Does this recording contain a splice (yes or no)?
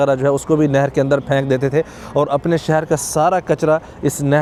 no